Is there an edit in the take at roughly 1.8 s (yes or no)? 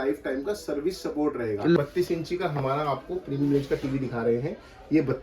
yes